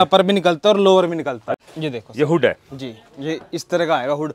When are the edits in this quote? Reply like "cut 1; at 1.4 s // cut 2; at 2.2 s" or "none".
cut 1; at 1.5 s

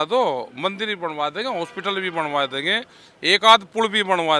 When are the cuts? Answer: none

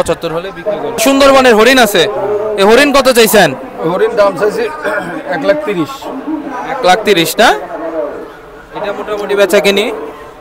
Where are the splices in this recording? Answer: cut 1; at 1.0 s

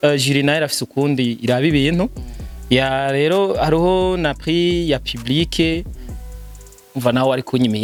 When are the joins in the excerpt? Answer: none

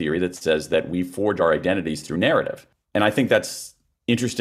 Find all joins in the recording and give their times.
cut 1; at 1.4 s

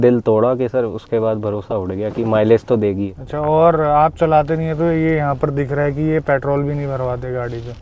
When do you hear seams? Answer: cut 1; at 3.1 s

